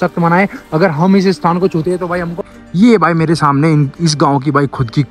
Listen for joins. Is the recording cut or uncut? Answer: cut